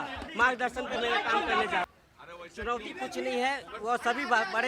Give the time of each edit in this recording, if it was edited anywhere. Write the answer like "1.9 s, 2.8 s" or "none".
1.9 s